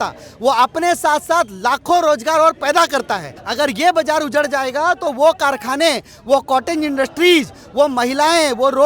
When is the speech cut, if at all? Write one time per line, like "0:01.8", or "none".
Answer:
0:03.4